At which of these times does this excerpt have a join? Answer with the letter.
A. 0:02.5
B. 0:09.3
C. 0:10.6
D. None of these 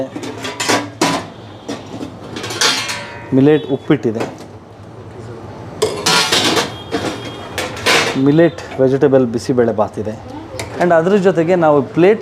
C